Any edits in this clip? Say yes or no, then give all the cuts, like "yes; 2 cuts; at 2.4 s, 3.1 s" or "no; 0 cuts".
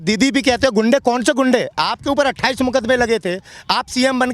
no; 0 cuts